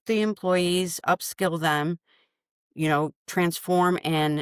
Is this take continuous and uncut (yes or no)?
yes